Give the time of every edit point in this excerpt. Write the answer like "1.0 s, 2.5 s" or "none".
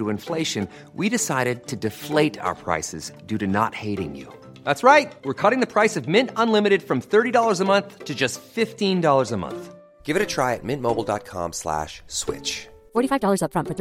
none